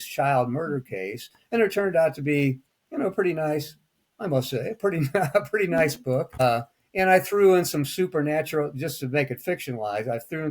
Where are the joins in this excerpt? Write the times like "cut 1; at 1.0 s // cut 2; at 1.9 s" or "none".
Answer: cut 1; at 6.4 s